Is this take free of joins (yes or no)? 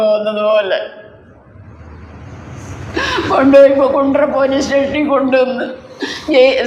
yes